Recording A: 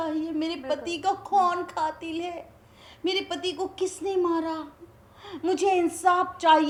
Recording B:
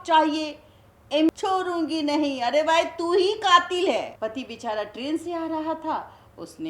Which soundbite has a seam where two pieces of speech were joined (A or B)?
B